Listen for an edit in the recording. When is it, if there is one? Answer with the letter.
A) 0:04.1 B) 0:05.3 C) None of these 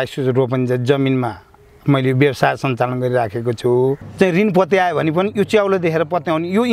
A